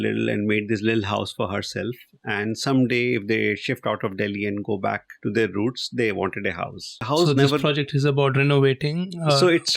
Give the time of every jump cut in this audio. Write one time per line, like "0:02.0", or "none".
0:05.1
0:07.1

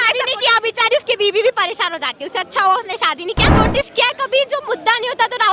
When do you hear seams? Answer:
0:03.5

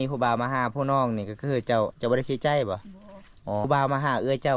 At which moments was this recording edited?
0:03.7

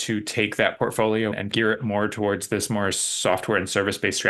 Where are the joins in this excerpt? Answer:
none

